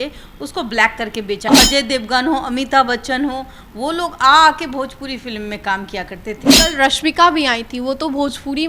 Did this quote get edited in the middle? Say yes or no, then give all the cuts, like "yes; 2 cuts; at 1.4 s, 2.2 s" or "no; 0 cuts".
yes; 2 cuts; at 1.5 s, 6.4 s